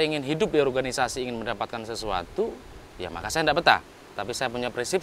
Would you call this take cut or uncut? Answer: uncut